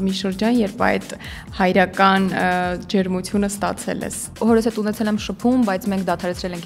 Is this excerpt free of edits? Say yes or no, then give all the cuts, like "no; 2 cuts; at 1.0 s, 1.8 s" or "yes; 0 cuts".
no; 1 cut; at 4.4 s